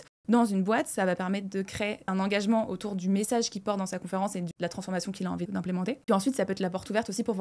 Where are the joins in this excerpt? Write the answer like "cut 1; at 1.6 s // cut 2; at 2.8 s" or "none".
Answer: cut 1; at 2.1 s // cut 2; at 6.1 s